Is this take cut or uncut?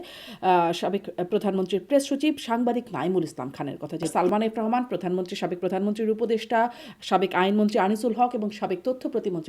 cut